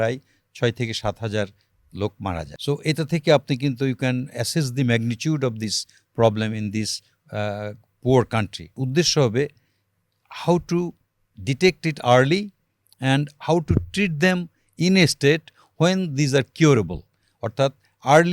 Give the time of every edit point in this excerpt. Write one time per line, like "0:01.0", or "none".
0:02.5
0:08.8